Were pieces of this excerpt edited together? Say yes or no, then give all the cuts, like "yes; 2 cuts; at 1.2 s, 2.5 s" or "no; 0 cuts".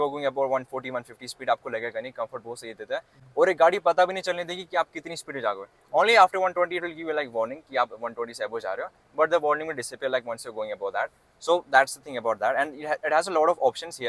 no; 0 cuts